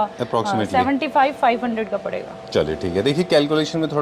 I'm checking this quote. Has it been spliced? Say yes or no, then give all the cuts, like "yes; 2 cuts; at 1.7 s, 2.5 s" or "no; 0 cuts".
no; 0 cuts